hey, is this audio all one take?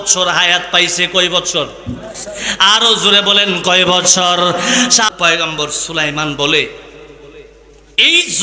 no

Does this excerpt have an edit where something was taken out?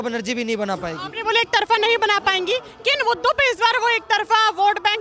no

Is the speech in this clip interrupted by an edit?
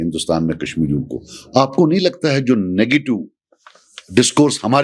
no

